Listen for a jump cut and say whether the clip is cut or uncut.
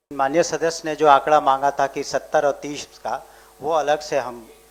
uncut